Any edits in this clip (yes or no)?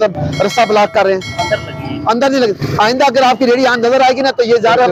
no